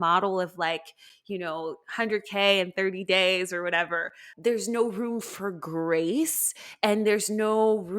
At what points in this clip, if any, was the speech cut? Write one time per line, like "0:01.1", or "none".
0:04.2